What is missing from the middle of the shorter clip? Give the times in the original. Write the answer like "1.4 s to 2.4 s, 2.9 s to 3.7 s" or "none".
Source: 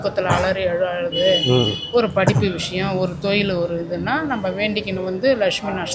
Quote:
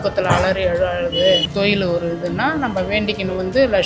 1.4 s to 3.1 s